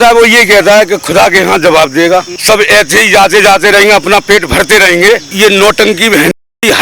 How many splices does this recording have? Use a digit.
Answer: 2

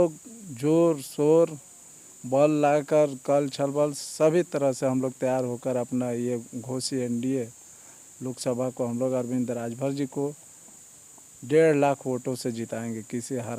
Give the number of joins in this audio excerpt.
0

